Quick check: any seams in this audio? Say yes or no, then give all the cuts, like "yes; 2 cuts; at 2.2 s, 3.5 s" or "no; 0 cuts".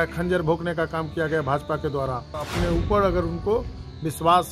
yes; 1 cut; at 2.4 s